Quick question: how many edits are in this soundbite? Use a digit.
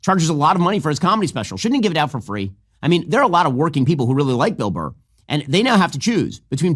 0